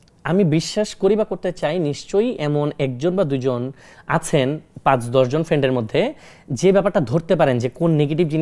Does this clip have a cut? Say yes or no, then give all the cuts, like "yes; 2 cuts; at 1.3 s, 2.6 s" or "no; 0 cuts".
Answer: no; 0 cuts